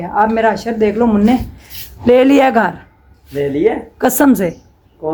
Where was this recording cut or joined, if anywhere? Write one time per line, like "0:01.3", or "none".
none